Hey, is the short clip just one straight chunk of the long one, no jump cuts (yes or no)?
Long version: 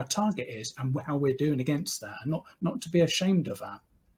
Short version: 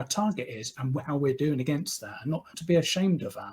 no